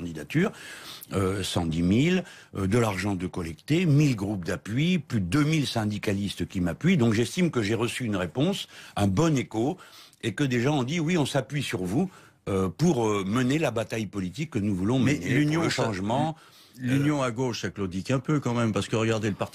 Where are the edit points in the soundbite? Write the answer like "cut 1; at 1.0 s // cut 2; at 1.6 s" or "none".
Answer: cut 1; at 3.4 s